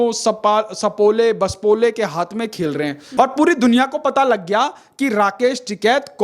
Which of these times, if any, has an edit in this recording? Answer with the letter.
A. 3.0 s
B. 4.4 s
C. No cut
A